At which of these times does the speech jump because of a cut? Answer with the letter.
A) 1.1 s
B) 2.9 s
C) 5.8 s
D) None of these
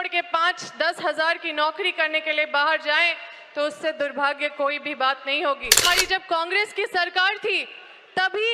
C